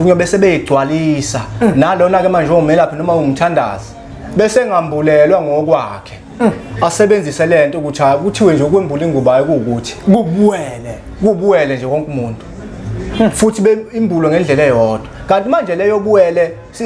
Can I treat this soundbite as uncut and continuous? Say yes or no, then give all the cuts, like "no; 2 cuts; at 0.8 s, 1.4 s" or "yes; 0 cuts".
yes; 0 cuts